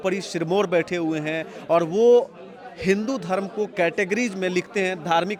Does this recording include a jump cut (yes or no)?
no